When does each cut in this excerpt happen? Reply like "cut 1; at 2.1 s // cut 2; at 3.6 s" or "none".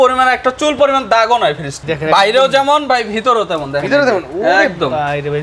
cut 1; at 1.8 s